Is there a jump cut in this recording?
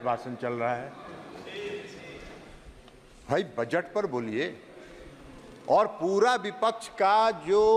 no; 0 cuts

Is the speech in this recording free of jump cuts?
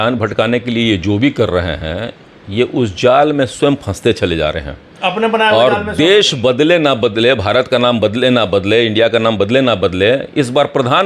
yes; 0 cuts

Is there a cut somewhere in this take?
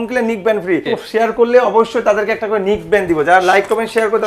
yes; 1 cut; at 0.9 s

